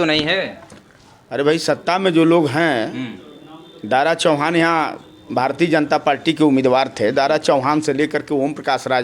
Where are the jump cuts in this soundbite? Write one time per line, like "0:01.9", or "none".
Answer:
none